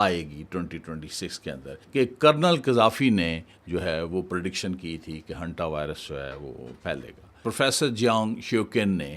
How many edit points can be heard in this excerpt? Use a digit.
2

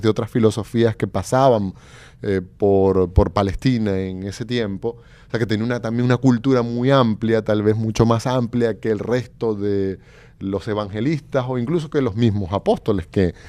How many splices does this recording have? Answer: 0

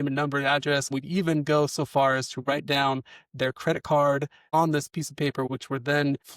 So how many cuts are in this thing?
3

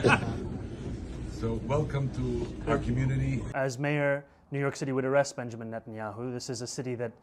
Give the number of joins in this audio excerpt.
1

